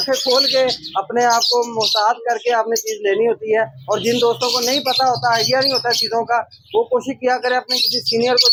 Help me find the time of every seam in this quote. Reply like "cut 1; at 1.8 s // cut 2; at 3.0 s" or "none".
none